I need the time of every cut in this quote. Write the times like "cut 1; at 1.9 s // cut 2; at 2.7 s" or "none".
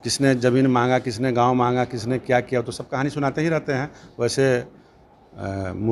none